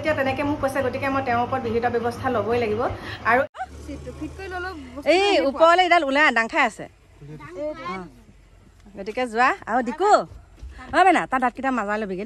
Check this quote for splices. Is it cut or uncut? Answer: cut